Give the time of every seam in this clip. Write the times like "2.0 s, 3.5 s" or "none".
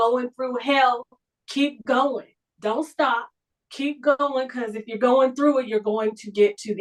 none